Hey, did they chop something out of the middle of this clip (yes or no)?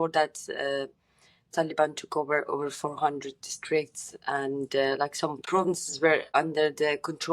yes